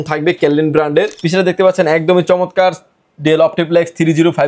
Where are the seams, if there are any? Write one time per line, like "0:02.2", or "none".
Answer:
0:01.2